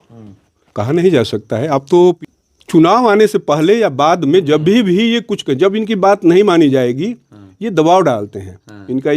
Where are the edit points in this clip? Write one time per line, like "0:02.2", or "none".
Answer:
0:02.3

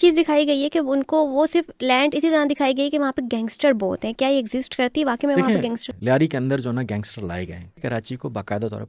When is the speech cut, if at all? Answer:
0:05.8
0:07.6

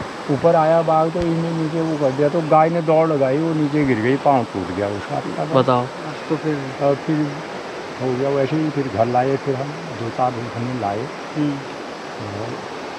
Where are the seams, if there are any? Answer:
none

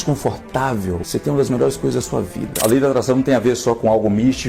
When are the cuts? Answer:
0:01.0
0:02.5

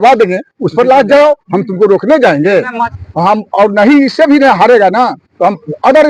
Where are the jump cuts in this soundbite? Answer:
0:03.0

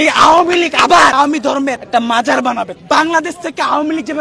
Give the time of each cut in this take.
0:01.1
0:02.8

